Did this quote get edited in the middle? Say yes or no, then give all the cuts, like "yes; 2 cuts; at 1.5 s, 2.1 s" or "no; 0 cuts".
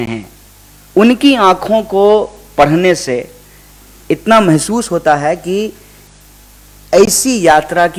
no; 0 cuts